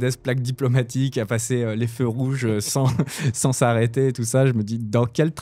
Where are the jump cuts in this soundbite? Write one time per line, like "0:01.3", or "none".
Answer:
none